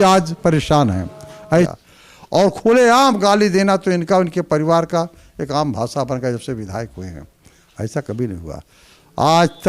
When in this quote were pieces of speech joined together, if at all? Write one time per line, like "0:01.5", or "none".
0:01.7